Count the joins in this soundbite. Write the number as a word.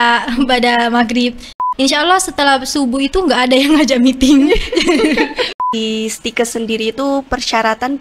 two